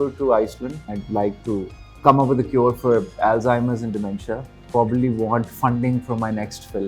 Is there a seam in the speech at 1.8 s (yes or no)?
yes